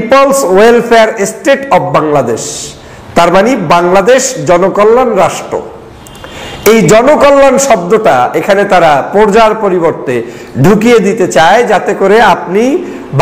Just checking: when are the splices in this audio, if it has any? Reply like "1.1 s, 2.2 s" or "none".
none